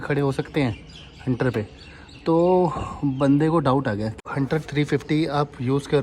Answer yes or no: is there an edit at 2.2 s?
no